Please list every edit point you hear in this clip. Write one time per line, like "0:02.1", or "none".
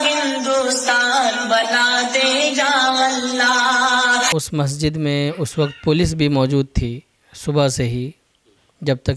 0:04.3